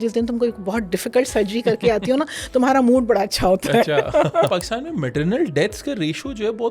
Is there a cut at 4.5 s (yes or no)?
yes